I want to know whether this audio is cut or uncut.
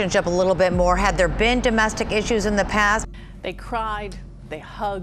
uncut